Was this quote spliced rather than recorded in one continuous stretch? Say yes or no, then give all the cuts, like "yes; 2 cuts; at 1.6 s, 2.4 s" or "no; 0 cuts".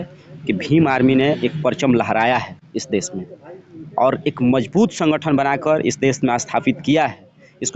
no; 0 cuts